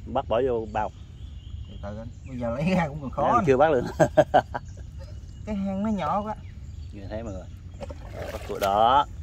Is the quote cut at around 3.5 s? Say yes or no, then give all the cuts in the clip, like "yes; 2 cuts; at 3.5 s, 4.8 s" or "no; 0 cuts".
no; 0 cuts